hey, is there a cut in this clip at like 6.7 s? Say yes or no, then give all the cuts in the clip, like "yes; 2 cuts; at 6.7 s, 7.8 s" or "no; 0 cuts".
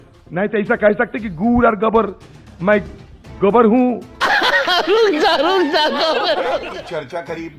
yes; 1 cut; at 6.7 s